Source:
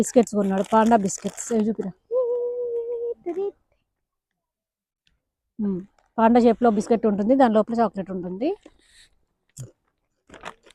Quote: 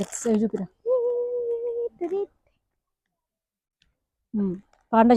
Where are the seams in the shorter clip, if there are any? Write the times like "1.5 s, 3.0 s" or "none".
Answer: none